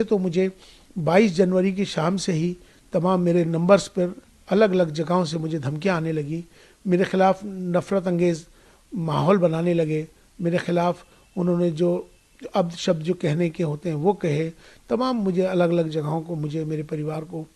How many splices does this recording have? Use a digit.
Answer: 0